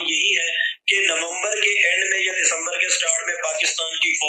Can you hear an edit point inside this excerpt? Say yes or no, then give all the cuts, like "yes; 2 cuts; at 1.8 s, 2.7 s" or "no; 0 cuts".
no; 0 cuts